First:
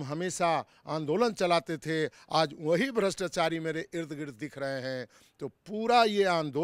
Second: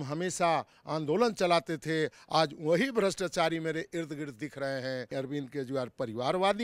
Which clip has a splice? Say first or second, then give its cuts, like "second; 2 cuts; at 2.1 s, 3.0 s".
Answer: second; 1 cut; at 5.1 s